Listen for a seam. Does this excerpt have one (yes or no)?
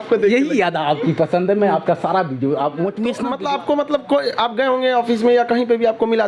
yes